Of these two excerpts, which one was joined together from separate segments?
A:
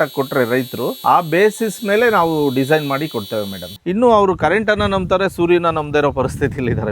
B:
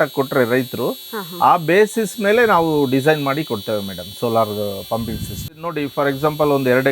A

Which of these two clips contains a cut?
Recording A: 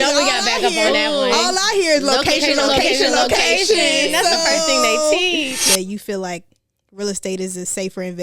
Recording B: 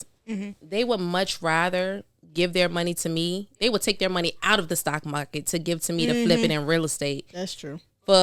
A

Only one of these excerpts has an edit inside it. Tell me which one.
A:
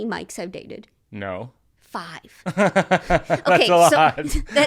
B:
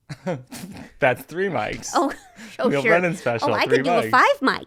A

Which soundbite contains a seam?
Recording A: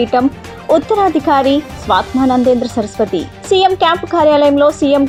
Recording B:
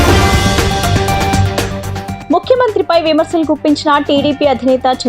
B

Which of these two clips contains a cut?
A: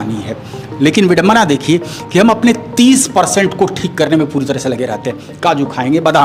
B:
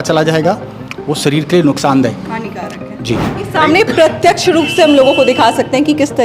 B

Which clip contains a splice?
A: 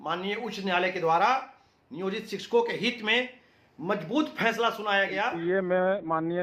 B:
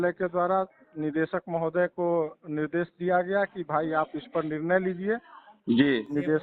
A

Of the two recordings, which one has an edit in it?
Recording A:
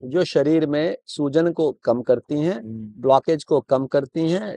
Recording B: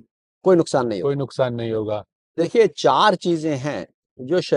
B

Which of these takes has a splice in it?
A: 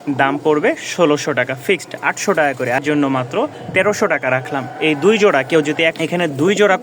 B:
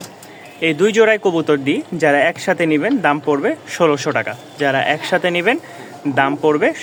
A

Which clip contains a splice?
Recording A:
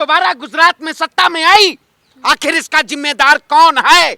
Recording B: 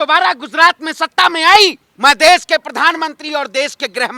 B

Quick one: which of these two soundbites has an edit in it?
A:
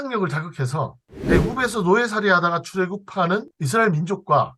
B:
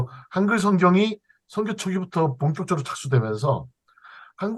A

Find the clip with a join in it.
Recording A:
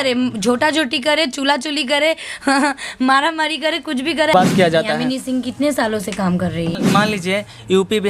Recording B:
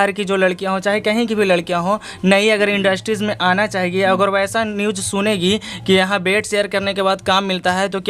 A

